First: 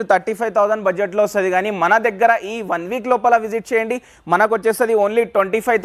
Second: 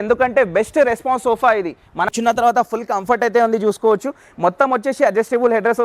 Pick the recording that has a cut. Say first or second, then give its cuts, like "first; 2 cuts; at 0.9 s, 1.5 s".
second; 1 cut; at 2.1 s